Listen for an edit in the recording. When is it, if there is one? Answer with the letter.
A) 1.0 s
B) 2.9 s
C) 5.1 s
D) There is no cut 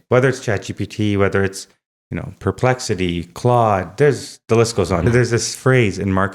C